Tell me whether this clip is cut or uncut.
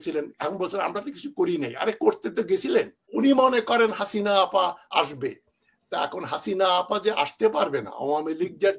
cut